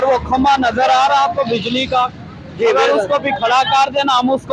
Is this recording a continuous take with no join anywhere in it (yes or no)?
yes